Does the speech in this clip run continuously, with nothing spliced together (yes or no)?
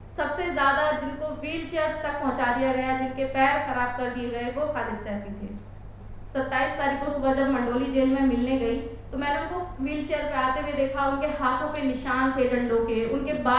no